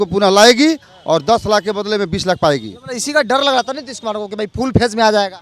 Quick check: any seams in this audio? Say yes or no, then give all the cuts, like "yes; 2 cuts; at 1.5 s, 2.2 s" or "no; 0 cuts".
no; 0 cuts